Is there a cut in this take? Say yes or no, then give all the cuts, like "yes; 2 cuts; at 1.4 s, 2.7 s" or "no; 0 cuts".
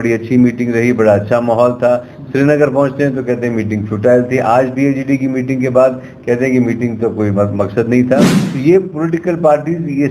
yes; 1 cut; at 8.4 s